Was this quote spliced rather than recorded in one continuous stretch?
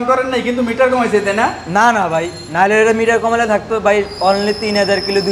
no; 0 cuts

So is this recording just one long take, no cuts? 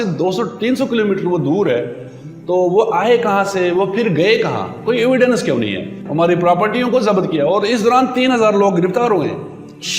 no; 1 cut; at 6.0 s

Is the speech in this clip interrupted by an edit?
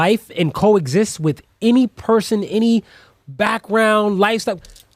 no; 0 cuts

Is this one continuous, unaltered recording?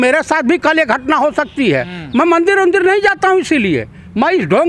yes; 0 cuts

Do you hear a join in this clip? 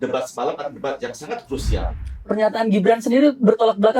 yes; 1 cut; at 1.8 s

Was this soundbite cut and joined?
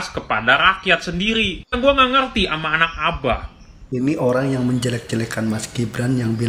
yes; 1 cut; at 3.7 s

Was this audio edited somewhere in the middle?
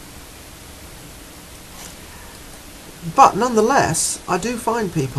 no; 0 cuts

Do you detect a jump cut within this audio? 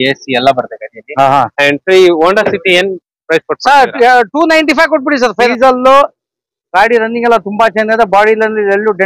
yes; 1 cut; at 5.5 s

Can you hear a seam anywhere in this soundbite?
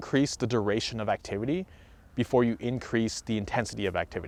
no; 0 cuts

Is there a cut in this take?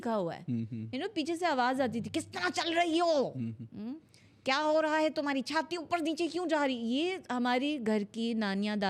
no; 0 cuts

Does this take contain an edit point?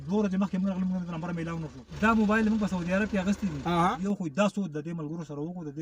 yes; 2 cuts; at 1.8 s, 4.0 s

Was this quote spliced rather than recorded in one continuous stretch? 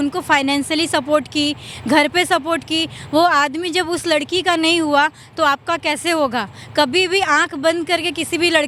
no; 0 cuts

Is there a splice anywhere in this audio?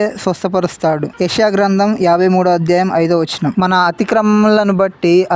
no; 0 cuts

